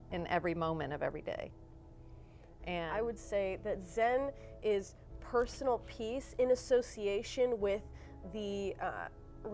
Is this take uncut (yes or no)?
no